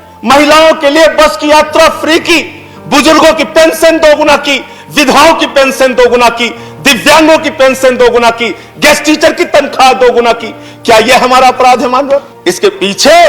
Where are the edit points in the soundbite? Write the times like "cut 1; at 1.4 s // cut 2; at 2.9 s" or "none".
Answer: cut 1; at 12.4 s